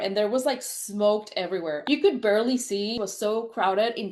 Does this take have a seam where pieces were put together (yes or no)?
no